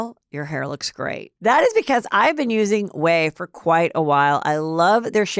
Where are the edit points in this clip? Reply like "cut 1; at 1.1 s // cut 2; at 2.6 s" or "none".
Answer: cut 1; at 1.2 s